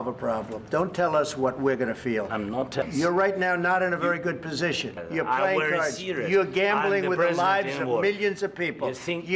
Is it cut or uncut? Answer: cut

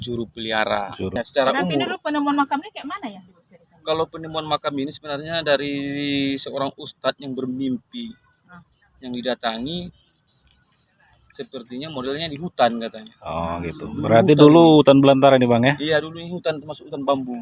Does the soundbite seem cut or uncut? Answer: cut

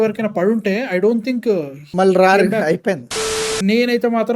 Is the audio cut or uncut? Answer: cut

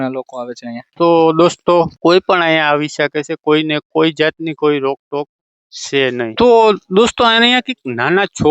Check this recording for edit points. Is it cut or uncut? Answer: uncut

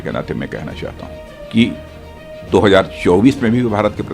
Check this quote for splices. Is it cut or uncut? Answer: cut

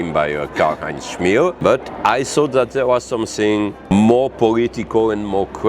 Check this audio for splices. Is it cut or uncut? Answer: cut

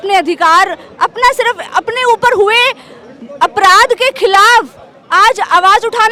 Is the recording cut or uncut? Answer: uncut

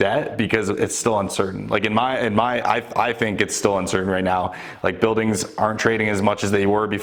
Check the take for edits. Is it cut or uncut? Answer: uncut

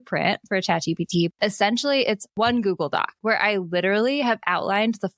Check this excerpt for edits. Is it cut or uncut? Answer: cut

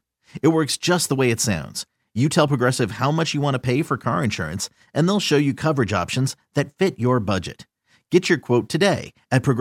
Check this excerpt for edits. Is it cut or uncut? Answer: uncut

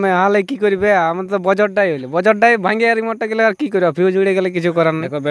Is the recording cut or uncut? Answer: uncut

